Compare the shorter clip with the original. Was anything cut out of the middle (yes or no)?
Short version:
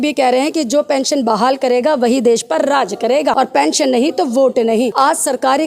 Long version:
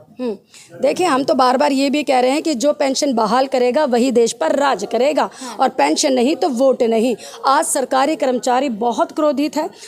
yes